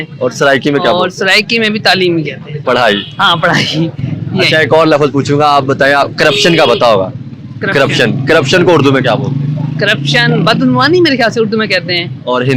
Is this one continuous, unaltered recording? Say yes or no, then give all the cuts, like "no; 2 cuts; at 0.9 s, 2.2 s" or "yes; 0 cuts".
yes; 0 cuts